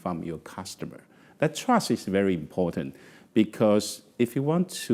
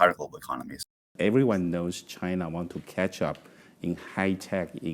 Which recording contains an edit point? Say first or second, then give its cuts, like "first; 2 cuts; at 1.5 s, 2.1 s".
second; 1 cut; at 1.1 s